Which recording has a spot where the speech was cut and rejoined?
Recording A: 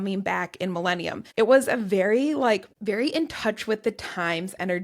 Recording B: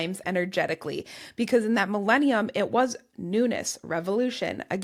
A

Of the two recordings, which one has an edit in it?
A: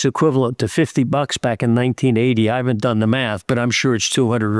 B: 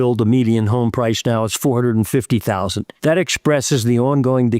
B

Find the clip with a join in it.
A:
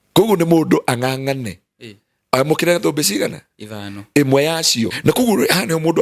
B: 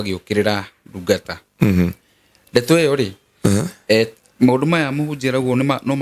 A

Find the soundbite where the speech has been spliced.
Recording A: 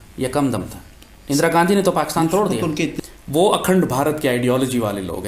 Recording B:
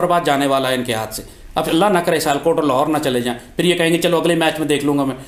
A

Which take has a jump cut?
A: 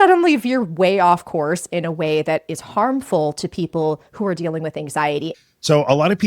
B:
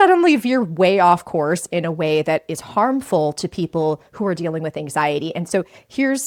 A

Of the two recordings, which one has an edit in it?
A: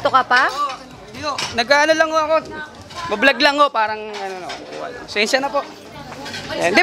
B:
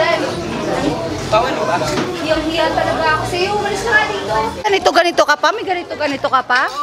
B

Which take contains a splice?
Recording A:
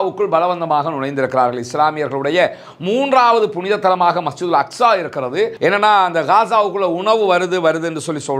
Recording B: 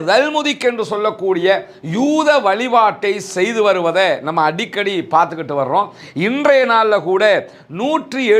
A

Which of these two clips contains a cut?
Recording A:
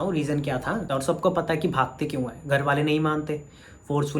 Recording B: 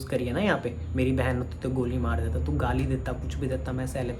A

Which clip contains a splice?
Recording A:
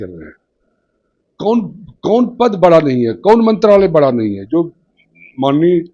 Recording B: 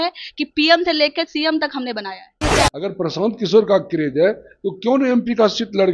B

